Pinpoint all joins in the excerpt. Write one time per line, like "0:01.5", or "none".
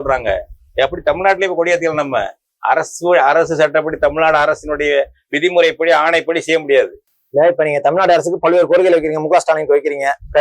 none